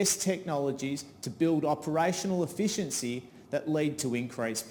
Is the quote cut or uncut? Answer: uncut